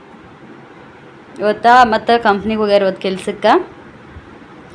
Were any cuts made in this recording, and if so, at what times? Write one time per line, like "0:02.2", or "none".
none